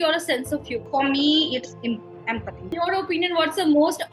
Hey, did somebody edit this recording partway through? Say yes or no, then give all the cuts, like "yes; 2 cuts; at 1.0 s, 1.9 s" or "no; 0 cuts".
yes; 2 cuts; at 0.9 s, 2.7 s